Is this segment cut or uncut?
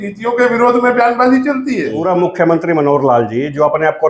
cut